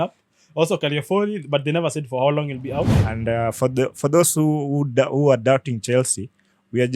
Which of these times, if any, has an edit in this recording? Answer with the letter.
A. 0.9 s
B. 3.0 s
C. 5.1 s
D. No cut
B